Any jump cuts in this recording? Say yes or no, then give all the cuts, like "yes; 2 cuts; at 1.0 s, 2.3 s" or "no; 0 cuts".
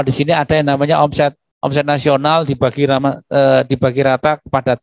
no; 0 cuts